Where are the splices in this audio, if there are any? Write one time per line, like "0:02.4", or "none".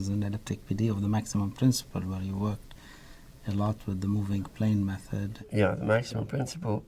0:05.3